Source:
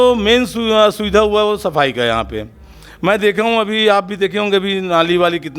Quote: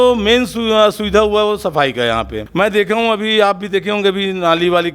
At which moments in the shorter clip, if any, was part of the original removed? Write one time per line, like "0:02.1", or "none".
0:02.4